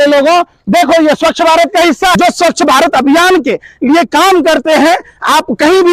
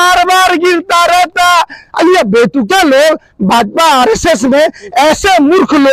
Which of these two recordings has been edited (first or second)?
first